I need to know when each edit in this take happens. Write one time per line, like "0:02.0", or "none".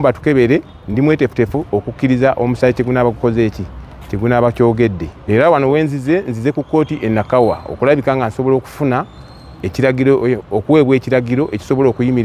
0:05.1